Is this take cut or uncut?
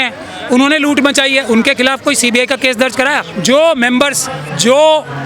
cut